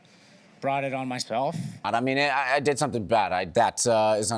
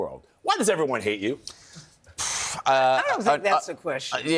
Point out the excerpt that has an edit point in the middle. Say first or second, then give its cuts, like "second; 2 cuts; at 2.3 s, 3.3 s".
first; 2 cuts; at 1.8 s, 3.5 s